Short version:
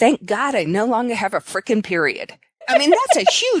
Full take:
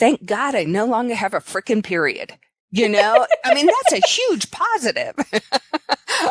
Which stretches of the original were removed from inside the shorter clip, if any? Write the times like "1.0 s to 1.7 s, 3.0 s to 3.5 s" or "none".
2.7 s to 3.4 s